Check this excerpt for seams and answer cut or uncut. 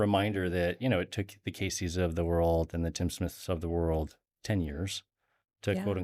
uncut